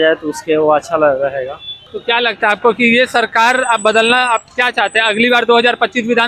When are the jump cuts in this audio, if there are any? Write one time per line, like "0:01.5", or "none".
0:01.9